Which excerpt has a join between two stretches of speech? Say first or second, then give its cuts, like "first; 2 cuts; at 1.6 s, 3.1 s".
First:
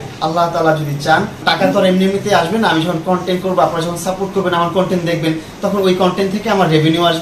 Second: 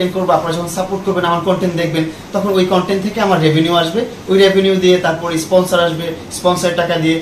first; 1 cut; at 1.4 s